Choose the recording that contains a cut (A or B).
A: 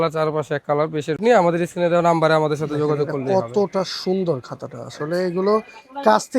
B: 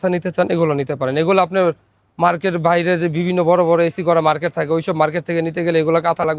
A